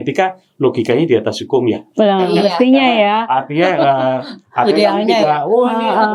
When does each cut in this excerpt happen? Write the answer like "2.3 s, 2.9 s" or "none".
none